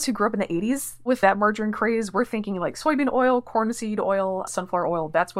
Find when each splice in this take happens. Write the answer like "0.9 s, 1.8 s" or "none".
1.1 s